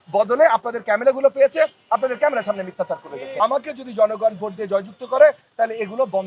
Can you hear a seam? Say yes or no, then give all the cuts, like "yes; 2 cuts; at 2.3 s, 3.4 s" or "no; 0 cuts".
yes; 1 cut; at 3.4 s